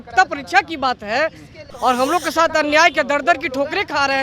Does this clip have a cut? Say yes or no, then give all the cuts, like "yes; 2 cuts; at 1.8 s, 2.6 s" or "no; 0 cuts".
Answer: yes; 1 cut; at 1.6 s